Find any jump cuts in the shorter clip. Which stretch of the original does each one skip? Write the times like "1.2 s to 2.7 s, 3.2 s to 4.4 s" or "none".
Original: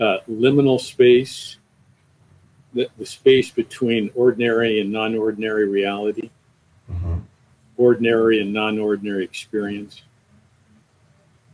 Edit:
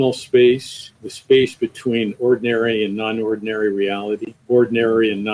1.7 s to 3.0 s, 6.3 s to 7.6 s